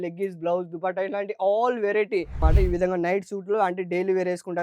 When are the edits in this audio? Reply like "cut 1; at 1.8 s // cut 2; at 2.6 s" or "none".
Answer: cut 1; at 2.4 s